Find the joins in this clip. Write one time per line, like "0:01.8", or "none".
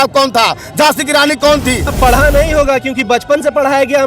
0:01.9